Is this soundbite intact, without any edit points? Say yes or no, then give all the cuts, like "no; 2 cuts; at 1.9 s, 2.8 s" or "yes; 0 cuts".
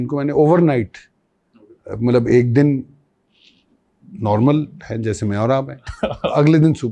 yes; 0 cuts